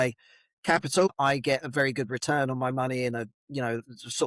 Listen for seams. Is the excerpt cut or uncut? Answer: cut